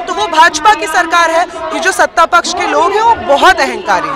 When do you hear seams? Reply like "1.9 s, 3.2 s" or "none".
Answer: 1.6 s

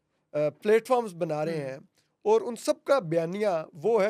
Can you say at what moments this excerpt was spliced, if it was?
none

